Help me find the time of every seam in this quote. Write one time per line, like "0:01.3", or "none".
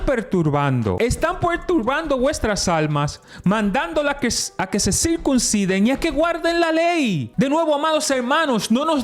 0:01.0
0:07.2